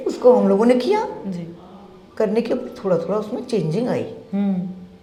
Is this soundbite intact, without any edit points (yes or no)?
yes